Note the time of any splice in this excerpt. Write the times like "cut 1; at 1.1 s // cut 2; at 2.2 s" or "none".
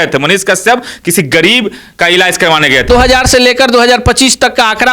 cut 1; at 2.9 s